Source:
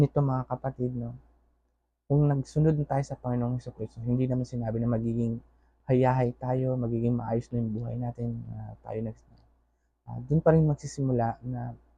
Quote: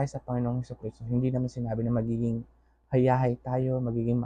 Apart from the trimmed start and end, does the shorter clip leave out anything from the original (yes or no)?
no